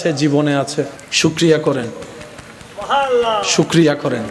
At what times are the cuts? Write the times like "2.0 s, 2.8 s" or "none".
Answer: 1.0 s